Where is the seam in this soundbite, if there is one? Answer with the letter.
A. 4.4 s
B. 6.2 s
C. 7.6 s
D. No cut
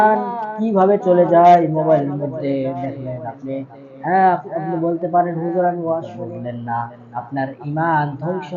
B